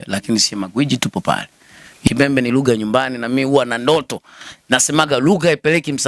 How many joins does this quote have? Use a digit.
1